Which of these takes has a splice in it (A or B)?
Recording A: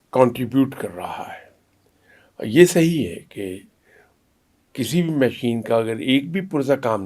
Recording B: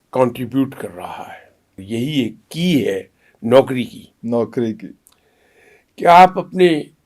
B